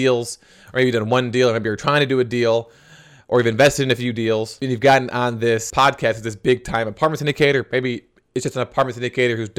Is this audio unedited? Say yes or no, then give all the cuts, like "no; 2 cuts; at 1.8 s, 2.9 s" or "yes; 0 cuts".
yes; 0 cuts